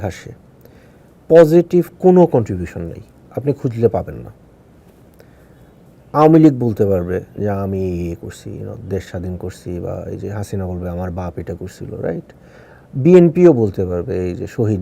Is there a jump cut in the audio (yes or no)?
yes